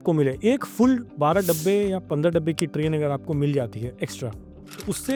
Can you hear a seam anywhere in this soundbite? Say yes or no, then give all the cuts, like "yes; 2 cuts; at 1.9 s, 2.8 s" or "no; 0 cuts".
no; 0 cuts